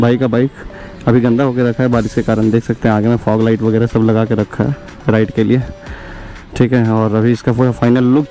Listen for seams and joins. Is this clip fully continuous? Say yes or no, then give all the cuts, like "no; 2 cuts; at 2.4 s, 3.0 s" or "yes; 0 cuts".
yes; 0 cuts